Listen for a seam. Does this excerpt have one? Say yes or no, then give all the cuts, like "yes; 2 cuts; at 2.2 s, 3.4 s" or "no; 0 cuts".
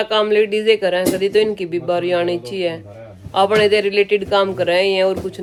no; 0 cuts